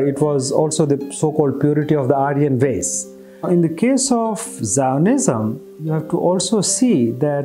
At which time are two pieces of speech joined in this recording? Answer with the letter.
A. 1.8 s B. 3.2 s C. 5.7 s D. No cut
C